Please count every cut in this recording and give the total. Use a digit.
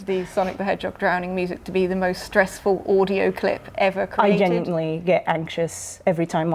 0